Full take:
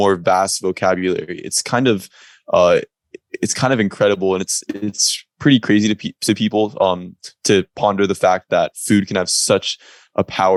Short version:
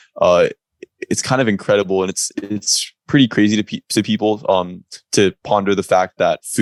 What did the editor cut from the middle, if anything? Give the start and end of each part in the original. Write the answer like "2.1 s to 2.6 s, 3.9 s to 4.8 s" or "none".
none